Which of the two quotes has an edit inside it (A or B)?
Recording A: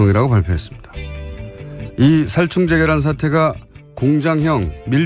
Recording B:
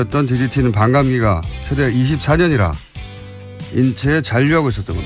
B